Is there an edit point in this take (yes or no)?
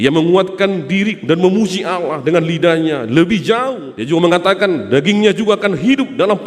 yes